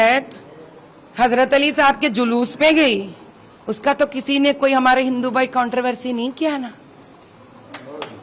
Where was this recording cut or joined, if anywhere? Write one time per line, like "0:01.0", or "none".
none